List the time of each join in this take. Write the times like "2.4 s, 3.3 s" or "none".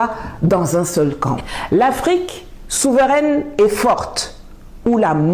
1.5 s